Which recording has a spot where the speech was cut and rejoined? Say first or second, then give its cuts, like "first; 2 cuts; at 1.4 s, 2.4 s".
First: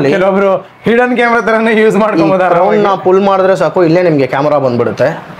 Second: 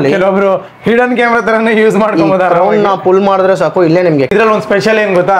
second; 1 cut; at 4.3 s